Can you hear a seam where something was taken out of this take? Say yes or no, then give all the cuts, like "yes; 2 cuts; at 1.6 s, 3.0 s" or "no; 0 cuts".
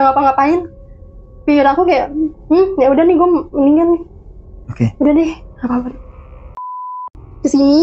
yes; 1 cut; at 6.9 s